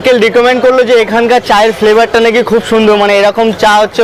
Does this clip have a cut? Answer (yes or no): no